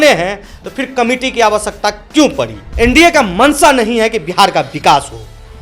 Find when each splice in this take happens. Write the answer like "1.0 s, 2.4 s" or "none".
2.6 s